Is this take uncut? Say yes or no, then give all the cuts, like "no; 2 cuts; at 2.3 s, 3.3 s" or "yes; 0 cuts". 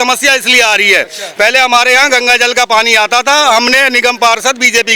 yes; 0 cuts